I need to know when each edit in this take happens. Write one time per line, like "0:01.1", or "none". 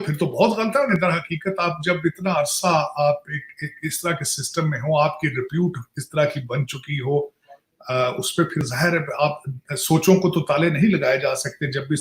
0:00.9